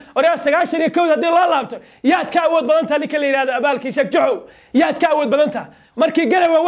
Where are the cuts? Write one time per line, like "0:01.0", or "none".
0:05.8